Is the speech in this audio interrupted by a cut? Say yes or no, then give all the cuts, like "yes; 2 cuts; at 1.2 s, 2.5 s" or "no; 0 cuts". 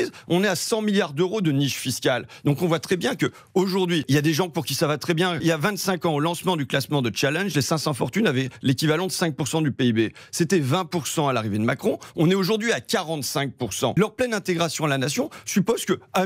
yes; 3 cuts; at 4.1 s, 5.4 s, 14.0 s